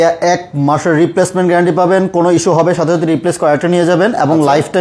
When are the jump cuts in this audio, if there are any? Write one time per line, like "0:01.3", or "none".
none